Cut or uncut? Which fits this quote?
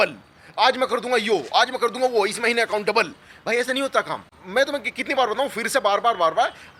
uncut